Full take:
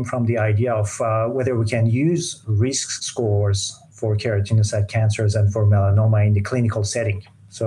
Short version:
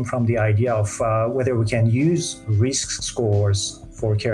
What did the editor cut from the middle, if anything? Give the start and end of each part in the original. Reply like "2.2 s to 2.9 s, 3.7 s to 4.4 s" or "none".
none